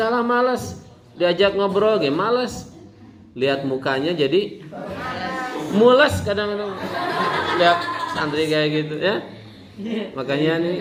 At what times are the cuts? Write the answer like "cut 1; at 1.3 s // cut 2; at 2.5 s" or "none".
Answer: none

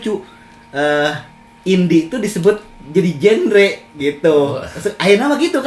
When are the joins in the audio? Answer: none

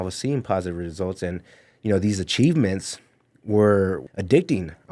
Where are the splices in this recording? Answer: cut 1; at 4.0 s

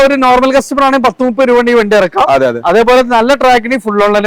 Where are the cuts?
none

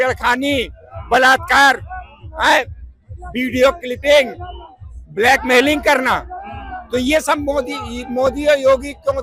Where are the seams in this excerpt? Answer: none

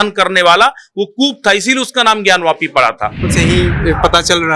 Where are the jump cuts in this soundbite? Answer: cut 1; at 3.3 s

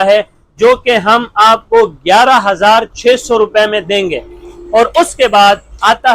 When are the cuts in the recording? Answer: none

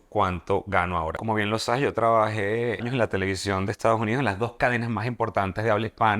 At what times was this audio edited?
cut 1; at 1.2 s // cut 2; at 2.9 s

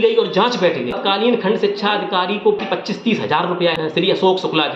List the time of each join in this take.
cut 1; at 1.0 s // cut 2; at 2.6 s // cut 3; at 3.7 s

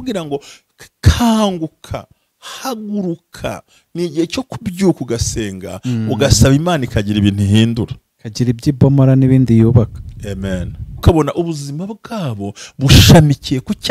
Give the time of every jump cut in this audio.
cut 1; at 11.0 s

